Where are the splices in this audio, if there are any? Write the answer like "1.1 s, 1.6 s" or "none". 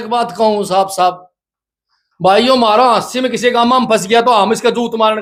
none